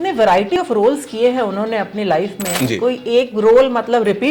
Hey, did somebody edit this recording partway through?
no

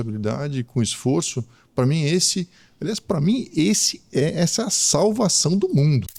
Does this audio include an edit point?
no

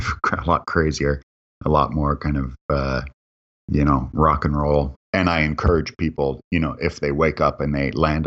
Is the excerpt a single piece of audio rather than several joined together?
no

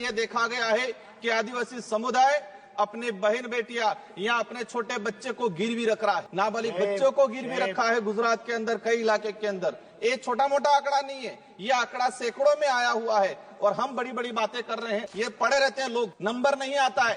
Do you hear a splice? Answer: yes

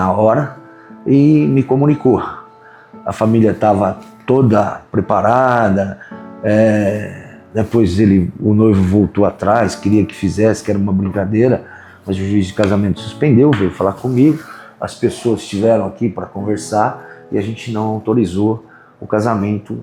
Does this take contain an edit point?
no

